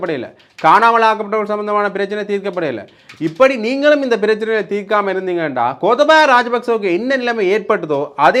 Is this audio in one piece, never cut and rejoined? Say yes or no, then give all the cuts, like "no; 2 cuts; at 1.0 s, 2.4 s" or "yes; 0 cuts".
yes; 0 cuts